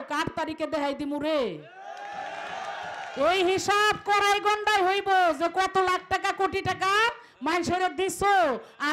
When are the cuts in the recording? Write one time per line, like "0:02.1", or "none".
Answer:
none